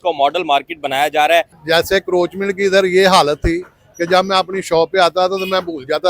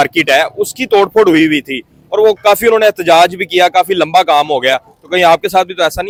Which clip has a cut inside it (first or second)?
first